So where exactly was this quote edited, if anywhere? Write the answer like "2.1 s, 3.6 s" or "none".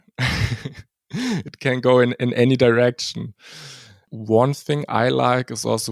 4.1 s